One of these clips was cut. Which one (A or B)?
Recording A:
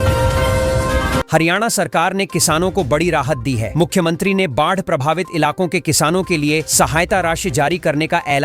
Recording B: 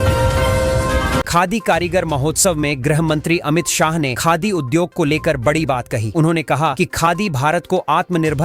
A